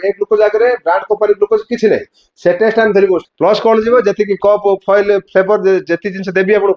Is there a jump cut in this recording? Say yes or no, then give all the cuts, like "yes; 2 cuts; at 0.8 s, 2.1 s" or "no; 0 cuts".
yes; 1 cut; at 3.3 s